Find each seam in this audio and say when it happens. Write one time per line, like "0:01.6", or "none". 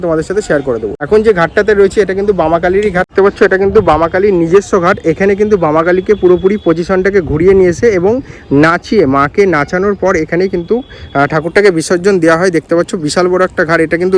none

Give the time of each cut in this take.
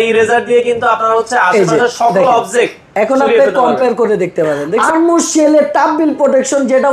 0:04.8

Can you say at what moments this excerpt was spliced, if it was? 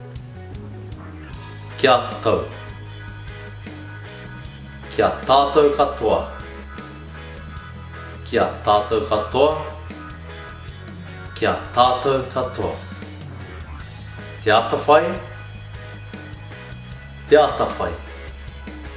none

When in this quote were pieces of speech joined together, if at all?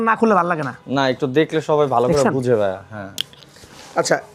none

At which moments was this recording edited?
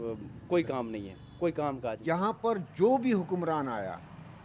0:02.3

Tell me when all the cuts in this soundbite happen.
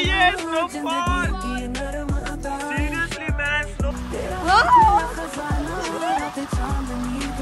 none

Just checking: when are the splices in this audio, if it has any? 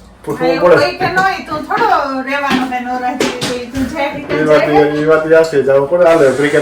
none

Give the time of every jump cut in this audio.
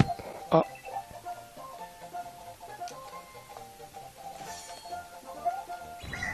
none

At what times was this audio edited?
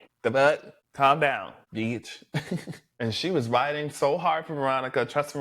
0:02.8

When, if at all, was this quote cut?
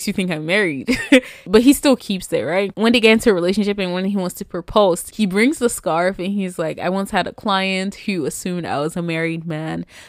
0:01.4
0:05.1

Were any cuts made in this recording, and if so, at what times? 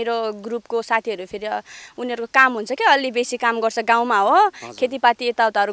none

